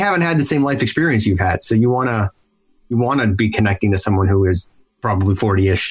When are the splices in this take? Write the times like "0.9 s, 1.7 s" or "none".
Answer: 4.9 s

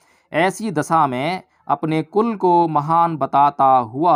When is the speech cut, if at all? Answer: none

